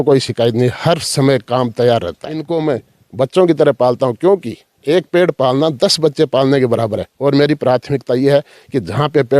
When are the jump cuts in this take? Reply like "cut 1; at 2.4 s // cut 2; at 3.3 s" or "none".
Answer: cut 1; at 2.4 s

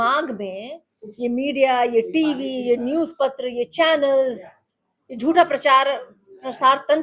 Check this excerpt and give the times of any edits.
none

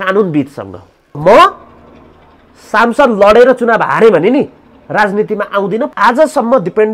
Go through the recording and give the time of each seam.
cut 1; at 1.2 s // cut 2; at 5.9 s

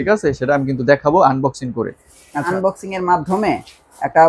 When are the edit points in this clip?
cut 1; at 2.5 s

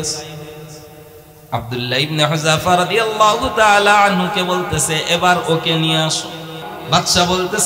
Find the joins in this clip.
cut 1; at 6.7 s

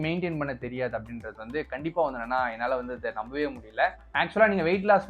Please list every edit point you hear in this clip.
cut 1; at 4.0 s

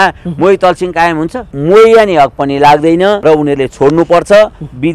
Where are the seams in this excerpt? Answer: cut 1; at 1.4 s // cut 2; at 3.2 s

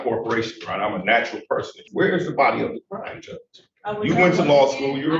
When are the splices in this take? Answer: cut 1; at 1.8 s

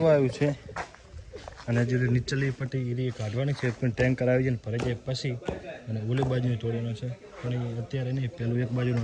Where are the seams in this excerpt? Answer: none

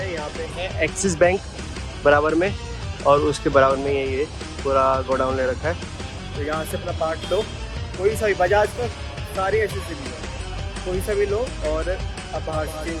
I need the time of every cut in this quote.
none

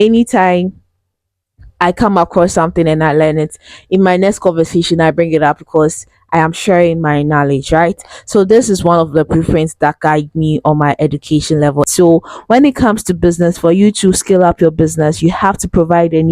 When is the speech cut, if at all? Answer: cut 1; at 11.9 s

